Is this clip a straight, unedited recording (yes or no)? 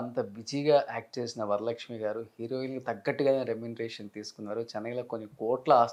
yes